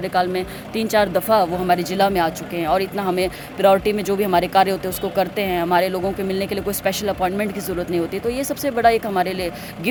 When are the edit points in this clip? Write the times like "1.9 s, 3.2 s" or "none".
none